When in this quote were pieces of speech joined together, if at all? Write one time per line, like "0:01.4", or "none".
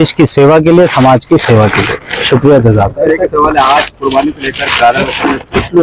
none